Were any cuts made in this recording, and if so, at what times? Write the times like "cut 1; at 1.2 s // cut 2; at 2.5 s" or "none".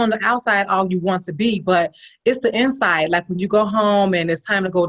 none